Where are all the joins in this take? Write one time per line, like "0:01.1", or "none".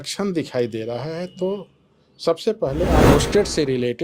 0:03.1